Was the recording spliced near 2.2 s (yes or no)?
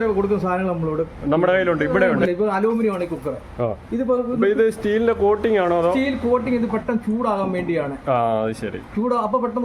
yes